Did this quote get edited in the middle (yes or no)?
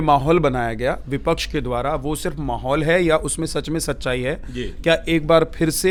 no